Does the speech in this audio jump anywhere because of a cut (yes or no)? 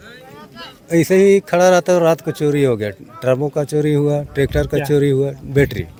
no